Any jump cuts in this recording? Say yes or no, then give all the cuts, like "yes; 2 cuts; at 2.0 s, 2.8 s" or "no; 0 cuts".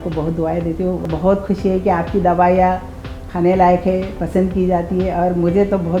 yes; 1 cut; at 1.0 s